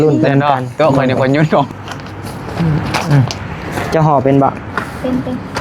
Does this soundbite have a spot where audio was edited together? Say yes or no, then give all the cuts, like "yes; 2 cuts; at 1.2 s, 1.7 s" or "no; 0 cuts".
yes; 1 cut; at 1.7 s